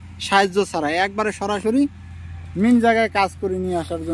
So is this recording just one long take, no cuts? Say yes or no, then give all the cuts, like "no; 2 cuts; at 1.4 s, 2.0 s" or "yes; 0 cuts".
yes; 0 cuts